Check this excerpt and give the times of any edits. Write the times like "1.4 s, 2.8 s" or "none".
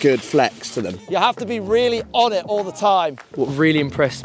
1.0 s, 3.3 s